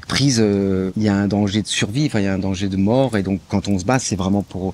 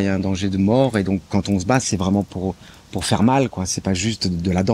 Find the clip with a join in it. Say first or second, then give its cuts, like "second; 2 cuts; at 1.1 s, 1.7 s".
first; 1 cut; at 0.9 s